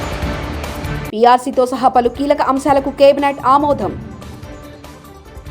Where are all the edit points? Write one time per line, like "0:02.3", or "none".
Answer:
0:01.0